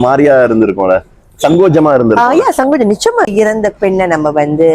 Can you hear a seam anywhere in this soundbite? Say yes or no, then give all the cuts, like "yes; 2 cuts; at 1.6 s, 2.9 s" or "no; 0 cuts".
yes; 1 cut; at 3.3 s